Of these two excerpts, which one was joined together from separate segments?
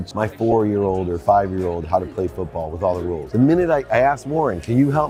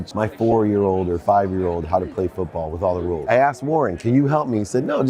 second; 1 cut; at 3.2 s

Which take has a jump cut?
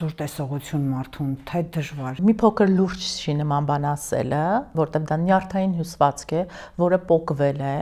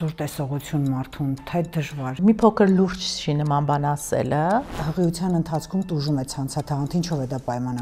second; 1 cut; at 4.7 s

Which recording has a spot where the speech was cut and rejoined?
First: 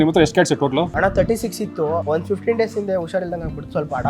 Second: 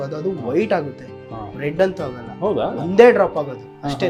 first; 2 cuts; at 0.9 s, 2.0 s

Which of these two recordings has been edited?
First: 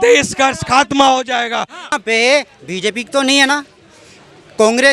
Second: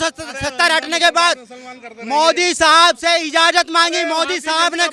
first; 1 cut; at 1.9 s

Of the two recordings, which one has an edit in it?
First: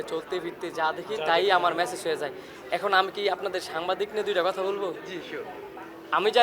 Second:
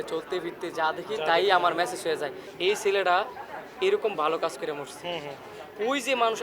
second; 1 cut; at 2.4 s

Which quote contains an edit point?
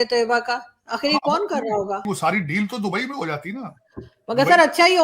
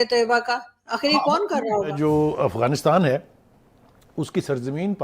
second; 1 cut; at 1.9 s

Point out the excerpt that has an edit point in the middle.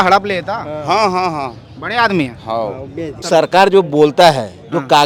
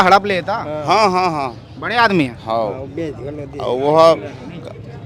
first; 1 cut; at 3.2 s

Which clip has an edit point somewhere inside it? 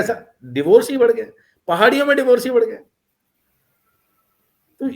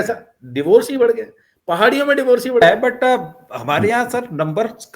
second; 1 cut; at 2.6 s

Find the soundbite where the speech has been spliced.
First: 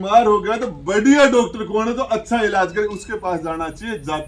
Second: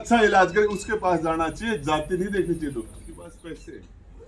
second; 1 cut; at 3.2 s

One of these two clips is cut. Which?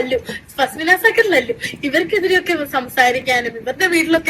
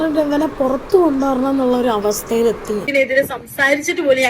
second; 1 cut; at 2.9 s

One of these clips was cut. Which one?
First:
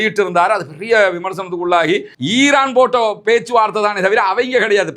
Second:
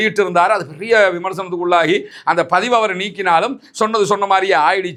first; 1 cut; at 2.1 s

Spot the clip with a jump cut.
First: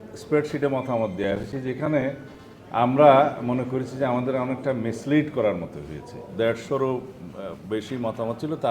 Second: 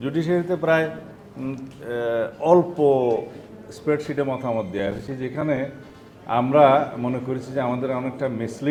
first; 1 cut; at 6.2 s

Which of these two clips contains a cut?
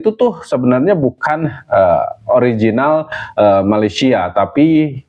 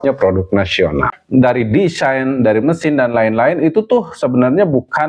second; 1 cut; at 1.2 s

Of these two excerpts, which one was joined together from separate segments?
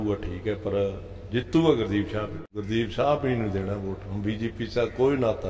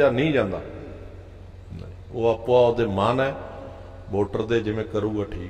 first; 1 cut; at 2.4 s

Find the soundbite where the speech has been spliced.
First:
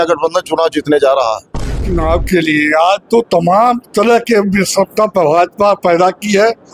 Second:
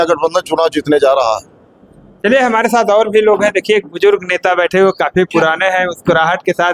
first; 1 cut; at 1.9 s

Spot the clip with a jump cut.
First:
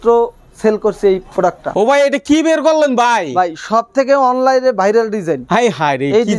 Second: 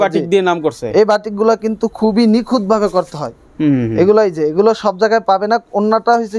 first; 1 cut; at 1.7 s

